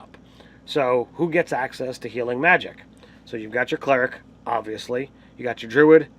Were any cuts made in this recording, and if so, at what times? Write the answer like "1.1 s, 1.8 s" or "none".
4.4 s